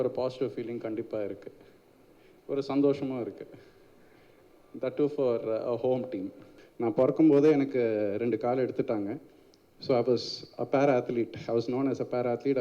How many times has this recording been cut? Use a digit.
1